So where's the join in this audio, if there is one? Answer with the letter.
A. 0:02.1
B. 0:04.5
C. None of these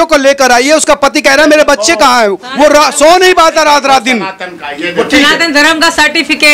C